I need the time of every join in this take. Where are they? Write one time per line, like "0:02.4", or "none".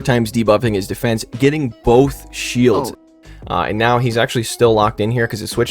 0:02.9